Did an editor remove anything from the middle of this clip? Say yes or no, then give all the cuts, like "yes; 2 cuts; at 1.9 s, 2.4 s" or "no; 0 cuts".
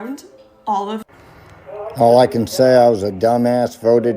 yes; 1 cut; at 1.1 s